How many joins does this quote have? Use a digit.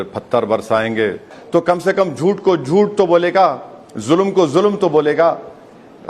1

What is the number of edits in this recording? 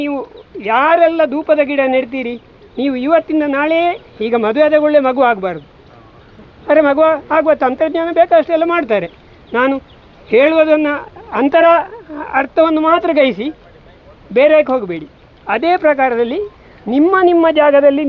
0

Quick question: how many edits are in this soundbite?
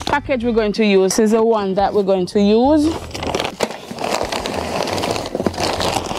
2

